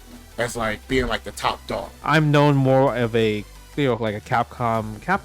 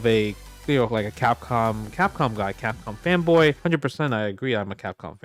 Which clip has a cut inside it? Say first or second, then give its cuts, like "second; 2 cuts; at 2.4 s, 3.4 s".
first; 1 cut; at 1.9 s